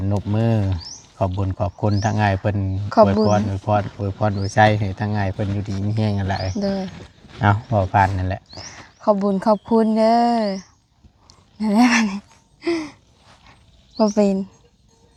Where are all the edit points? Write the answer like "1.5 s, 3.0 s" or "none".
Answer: none